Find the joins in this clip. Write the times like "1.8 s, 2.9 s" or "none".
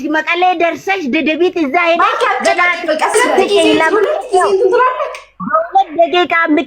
3.1 s